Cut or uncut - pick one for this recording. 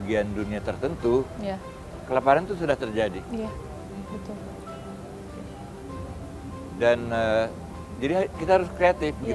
uncut